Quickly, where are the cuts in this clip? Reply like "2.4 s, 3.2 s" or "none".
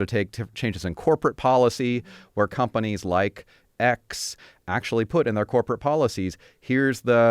4.5 s